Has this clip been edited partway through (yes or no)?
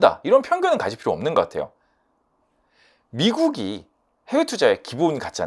no